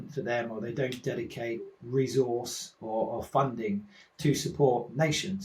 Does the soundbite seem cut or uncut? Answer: uncut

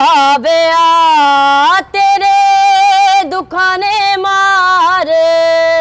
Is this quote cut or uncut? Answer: uncut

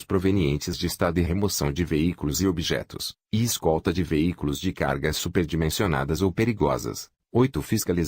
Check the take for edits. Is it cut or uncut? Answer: cut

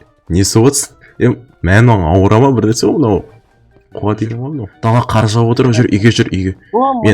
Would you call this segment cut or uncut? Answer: cut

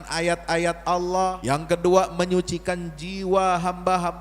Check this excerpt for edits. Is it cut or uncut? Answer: cut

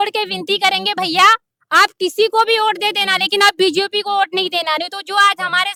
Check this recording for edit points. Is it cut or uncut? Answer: uncut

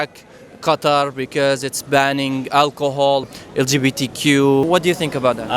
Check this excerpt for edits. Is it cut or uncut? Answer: cut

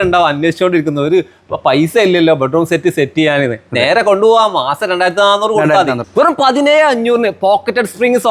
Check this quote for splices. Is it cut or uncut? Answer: cut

